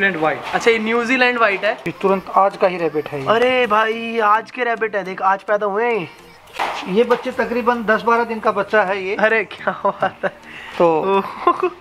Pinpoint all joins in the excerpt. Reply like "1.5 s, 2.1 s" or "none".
1.9 s, 6.5 s